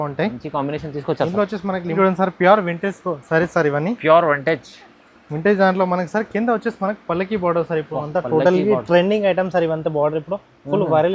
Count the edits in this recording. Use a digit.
1